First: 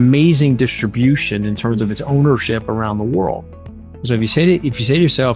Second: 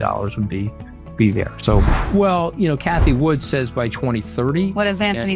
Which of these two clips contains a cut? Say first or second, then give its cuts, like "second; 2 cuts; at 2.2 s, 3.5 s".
second; 1 cut; at 2.0 s